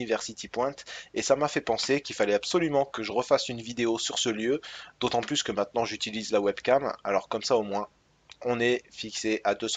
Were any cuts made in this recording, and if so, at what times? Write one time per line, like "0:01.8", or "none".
0:01.5